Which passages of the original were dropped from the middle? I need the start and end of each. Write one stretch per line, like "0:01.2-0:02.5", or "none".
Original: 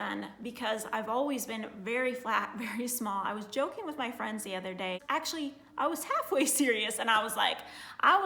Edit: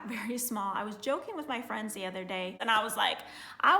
0:05.0-0:06.9